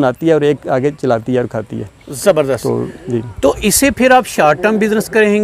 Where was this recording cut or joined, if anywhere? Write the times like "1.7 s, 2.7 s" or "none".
none